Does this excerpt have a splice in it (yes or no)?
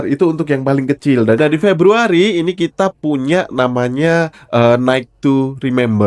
yes